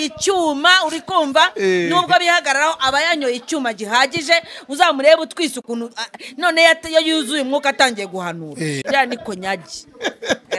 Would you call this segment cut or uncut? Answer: cut